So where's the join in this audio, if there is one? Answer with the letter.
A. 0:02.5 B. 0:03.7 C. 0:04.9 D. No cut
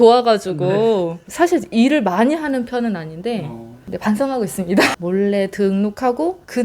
C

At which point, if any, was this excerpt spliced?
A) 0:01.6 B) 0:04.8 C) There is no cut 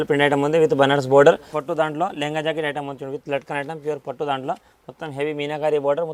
A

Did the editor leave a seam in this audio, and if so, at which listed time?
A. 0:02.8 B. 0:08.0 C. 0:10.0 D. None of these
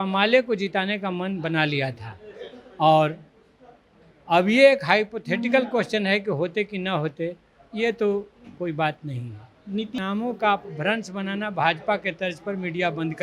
C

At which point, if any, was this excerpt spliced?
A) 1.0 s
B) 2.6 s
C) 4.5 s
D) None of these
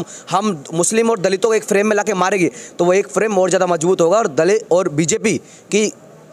D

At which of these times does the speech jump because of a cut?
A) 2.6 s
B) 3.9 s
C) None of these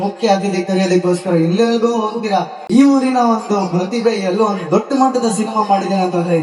A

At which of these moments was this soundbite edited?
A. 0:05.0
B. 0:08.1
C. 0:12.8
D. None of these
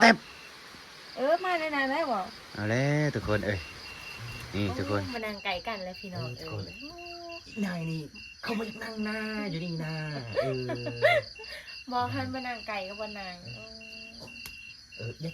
A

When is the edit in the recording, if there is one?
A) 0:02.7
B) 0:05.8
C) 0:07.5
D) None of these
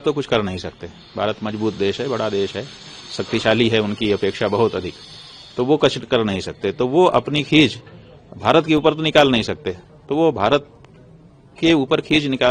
D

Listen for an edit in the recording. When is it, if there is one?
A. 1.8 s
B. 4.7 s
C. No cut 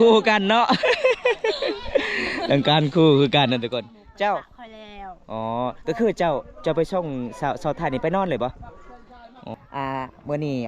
C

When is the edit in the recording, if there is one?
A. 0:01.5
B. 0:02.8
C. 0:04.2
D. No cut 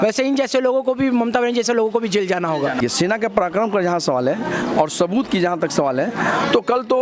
B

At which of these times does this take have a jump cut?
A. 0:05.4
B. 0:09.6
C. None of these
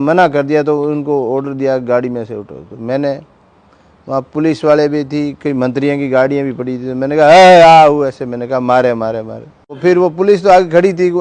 B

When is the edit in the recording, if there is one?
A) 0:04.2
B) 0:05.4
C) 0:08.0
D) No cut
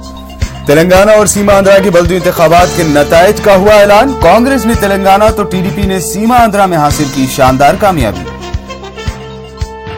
D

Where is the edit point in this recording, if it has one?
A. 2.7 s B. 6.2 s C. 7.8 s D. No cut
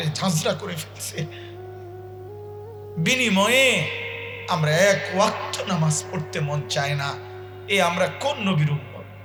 D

